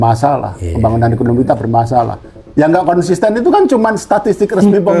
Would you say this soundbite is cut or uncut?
uncut